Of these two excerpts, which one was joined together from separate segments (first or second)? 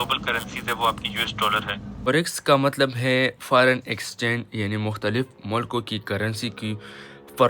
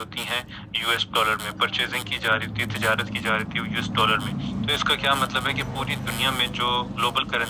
first